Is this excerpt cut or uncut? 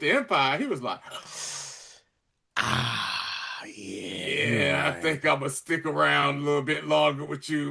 uncut